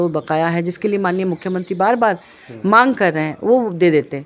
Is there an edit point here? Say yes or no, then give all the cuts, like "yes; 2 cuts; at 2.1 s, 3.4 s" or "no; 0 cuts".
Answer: no; 0 cuts